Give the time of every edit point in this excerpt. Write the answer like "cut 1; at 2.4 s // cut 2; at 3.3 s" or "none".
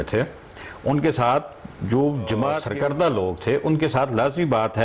cut 1; at 2.7 s